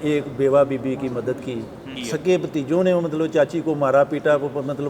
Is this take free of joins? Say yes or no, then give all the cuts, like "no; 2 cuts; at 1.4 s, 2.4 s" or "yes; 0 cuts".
no; 1 cut; at 2.0 s